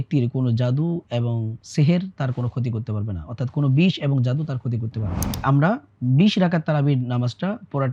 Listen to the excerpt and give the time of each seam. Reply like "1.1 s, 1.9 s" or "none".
5.3 s